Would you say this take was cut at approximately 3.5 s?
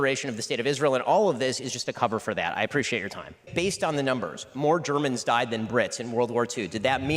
yes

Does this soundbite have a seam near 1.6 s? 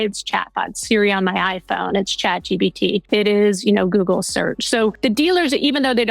no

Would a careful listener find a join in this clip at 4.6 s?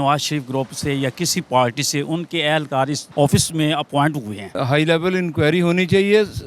yes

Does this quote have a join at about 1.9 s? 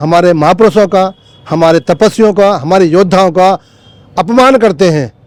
no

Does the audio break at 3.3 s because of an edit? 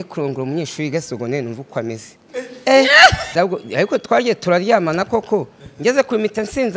yes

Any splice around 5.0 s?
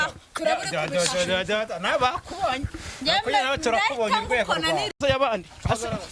yes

